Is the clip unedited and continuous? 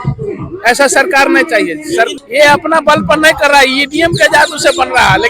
no; 1 cut; at 2.2 s

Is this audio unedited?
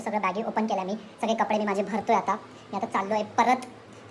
yes; 0 cuts

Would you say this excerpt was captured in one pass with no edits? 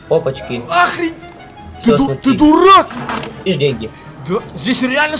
no; 1 cut; at 3.4 s

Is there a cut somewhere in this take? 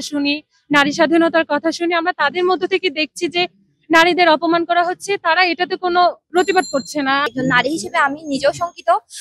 yes; 1 cut; at 7.2 s

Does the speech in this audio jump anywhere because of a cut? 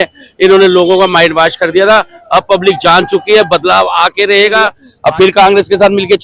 yes; 1 cut; at 4.8 s

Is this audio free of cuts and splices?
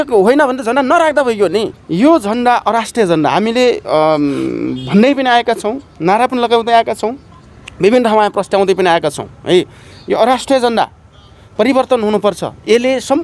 no; 1 cut; at 1.7 s

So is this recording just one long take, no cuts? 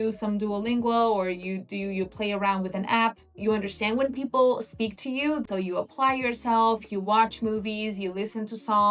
no; 2 cuts; at 3.3 s, 5.4 s

